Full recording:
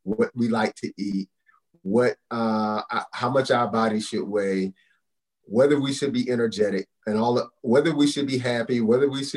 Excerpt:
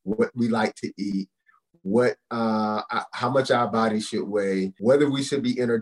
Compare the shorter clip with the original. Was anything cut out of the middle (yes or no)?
yes